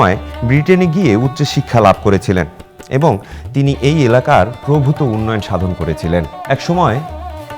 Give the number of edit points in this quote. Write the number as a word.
one